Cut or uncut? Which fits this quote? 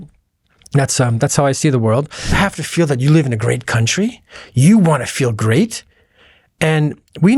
cut